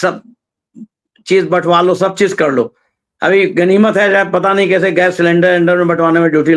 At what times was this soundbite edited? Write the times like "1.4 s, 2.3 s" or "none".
none